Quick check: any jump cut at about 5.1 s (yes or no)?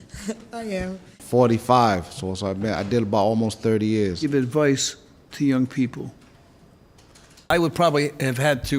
no